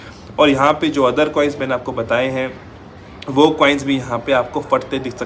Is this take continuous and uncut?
yes; 0 cuts

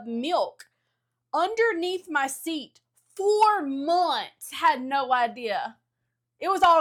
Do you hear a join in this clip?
no; 0 cuts

